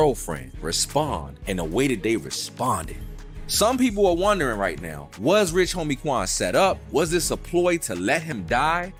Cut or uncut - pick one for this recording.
uncut